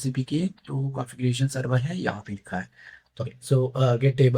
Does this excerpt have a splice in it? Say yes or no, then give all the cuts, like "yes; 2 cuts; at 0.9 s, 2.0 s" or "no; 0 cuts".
yes; 1 cut; at 3.2 s